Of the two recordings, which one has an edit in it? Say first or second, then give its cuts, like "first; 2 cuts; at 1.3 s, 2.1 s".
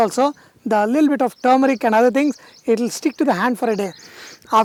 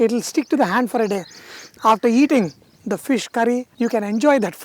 second; 1 cut; at 3.7 s